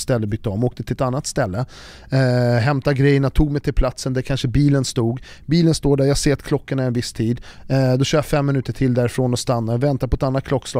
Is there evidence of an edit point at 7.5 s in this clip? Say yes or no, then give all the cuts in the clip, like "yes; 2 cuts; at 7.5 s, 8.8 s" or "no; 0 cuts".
yes; 1 cut; at 7.5 s